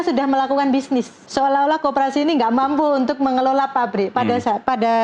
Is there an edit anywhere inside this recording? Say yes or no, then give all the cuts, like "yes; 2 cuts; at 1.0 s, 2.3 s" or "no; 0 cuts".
yes; 1 cut; at 1.2 s